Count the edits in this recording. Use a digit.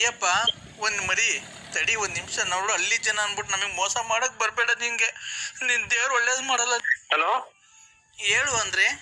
1